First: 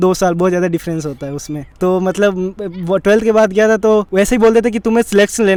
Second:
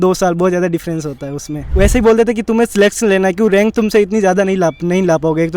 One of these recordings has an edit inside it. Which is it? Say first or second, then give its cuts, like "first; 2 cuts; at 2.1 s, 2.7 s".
second; 1 cut; at 1.7 s